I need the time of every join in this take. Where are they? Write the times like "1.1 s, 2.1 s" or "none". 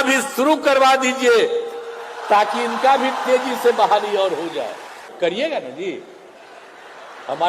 5.1 s